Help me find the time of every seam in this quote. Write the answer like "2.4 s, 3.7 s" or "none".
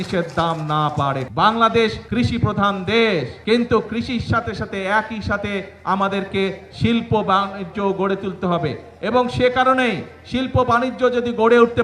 1.2 s, 2.0 s, 3.3 s

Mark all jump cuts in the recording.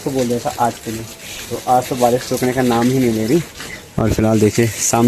none

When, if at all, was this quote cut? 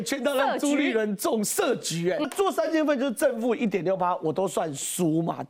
2.2 s

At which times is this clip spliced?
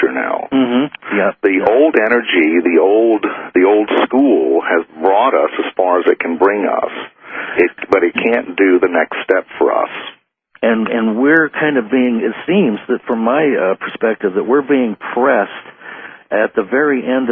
none

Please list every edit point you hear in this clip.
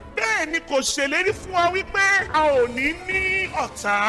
2.2 s

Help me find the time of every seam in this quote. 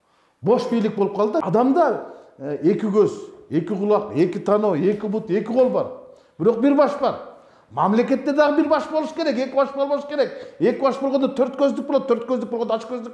1.4 s

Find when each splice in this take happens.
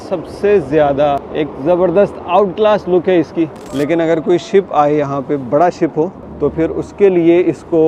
1.3 s, 3.6 s, 6.2 s

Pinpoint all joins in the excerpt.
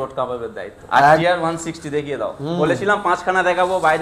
1.2 s

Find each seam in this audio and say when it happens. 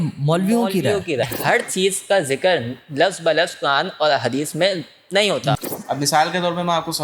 1.2 s, 5.6 s

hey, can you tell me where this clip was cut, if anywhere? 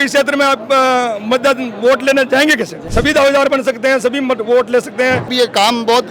2.8 s, 5.3 s

